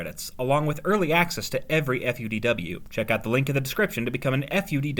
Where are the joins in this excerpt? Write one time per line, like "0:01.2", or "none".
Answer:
0:02.8